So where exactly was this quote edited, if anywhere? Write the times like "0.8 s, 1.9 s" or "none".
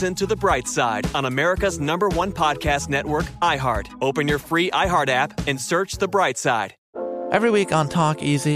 6.8 s